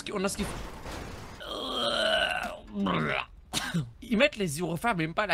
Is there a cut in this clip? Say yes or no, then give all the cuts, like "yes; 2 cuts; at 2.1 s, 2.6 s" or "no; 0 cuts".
yes; 2 cuts; at 1.2 s, 3.9 s